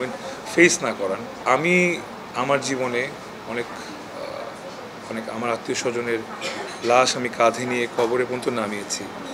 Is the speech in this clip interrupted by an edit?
no; 0 cuts

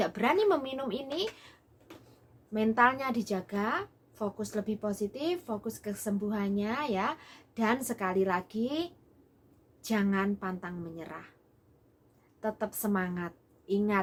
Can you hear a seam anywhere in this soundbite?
no; 0 cuts

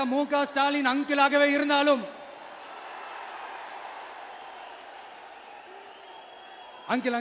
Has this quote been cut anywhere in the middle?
no; 0 cuts

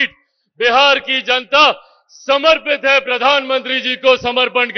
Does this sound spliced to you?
no; 0 cuts

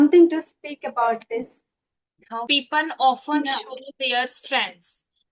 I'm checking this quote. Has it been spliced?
yes; 1 cut; at 2.5 s

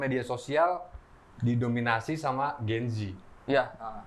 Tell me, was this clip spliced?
no; 0 cuts

